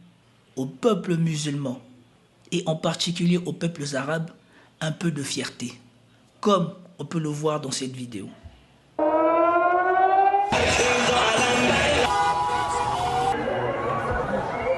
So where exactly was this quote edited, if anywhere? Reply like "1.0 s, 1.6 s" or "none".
10.5 s, 12.1 s, 13.3 s